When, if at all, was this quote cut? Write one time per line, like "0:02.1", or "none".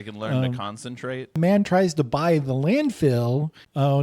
0:01.4

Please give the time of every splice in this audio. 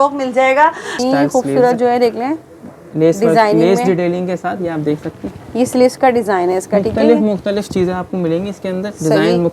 0:01.0

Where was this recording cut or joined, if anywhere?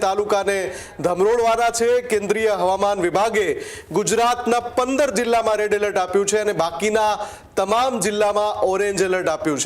none

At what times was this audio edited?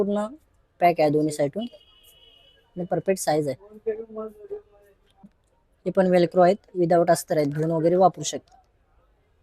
0:05.2

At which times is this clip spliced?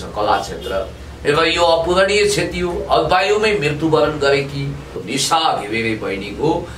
0:05.0

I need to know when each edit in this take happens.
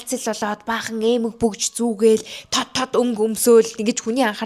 none

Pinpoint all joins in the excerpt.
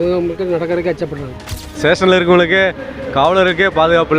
0:01.8

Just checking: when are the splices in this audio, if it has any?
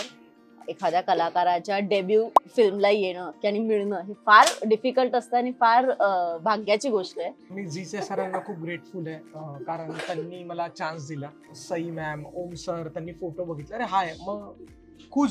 0:07.6
0:11.6

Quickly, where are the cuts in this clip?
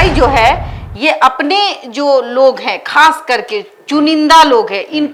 none

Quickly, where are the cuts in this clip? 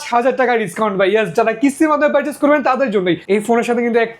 0:03.2

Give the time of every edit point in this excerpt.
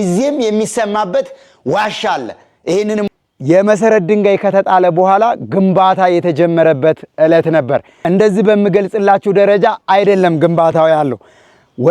0:03.1

